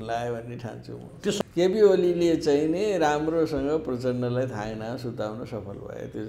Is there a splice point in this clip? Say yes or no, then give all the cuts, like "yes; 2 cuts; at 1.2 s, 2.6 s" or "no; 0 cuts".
yes; 1 cut; at 1.2 s